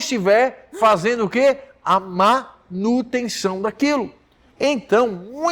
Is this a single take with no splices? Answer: yes; 0 cuts

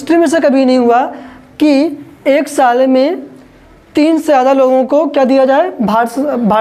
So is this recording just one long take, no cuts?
yes; 0 cuts

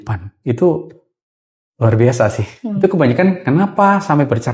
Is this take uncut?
no; 1 cut; at 2.8 s

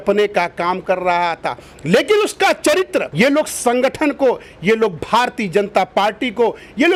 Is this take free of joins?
yes; 0 cuts

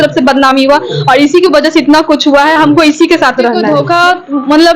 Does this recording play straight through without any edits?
no; 1 cut; at 3.6 s

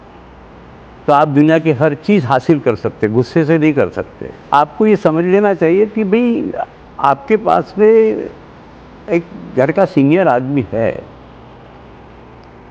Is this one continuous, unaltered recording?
no; 1 cut; at 4.4 s

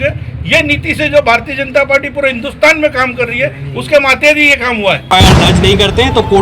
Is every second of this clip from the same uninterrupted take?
no; 1 cut; at 5.1 s

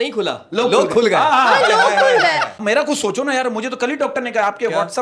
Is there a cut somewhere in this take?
yes; 1 cut; at 2.5 s

